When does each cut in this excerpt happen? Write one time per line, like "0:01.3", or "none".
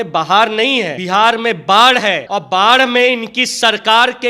0:01.0
0:02.2